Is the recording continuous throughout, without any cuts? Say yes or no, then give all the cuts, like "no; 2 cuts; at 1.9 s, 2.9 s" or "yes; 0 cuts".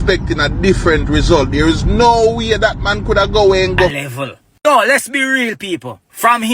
no; 1 cut; at 4.0 s